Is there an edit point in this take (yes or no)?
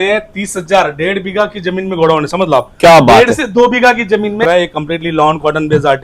yes